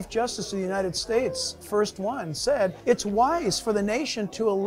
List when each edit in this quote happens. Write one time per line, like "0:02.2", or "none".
0:02.8

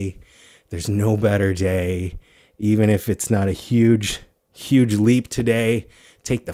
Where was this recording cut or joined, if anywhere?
none

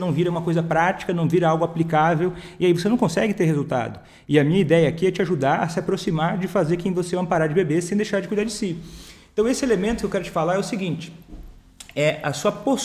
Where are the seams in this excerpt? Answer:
none

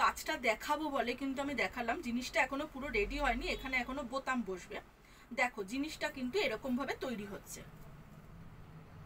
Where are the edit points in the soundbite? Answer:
none

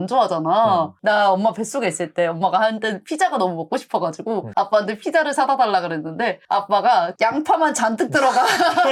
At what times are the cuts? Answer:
none

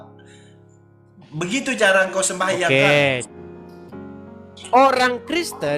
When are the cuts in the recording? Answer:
0:03.3

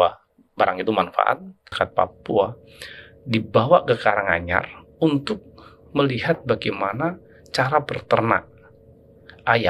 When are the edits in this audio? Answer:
0:01.7

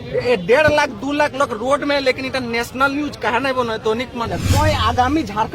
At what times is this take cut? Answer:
0:04.3

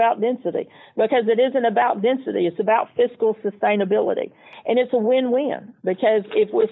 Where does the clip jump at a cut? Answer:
0:04.5

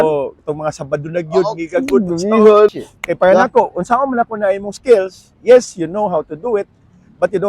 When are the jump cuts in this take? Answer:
0:02.7

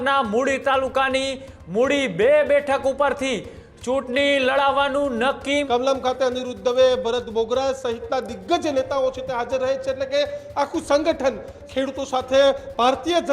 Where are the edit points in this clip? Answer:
0:05.6
0:11.6

